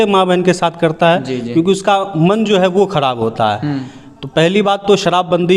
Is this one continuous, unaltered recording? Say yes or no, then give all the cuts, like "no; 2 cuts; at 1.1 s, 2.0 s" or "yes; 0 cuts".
yes; 0 cuts